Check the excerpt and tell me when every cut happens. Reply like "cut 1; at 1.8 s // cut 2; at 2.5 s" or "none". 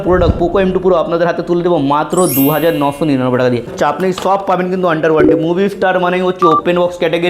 cut 1; at 3.7 s